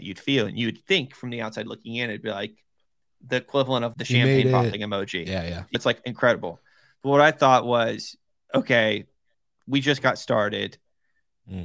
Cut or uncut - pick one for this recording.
cut